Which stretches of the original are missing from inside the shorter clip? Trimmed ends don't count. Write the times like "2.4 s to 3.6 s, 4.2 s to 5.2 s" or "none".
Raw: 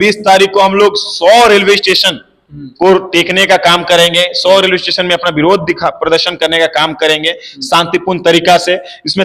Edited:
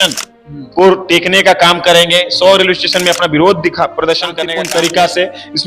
6.5 s to 7.9 s